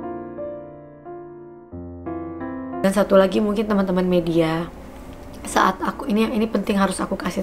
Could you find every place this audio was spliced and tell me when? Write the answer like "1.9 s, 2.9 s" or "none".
2.8 s